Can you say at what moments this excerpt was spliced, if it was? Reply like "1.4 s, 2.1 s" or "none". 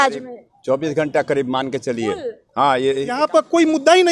3.2 s